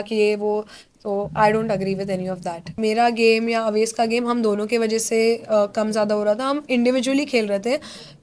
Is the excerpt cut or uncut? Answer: cut